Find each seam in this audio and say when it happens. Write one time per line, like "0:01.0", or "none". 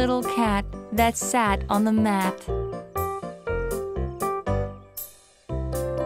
0:02.3